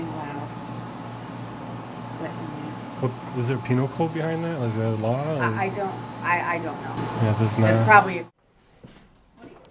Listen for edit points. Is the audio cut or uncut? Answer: cut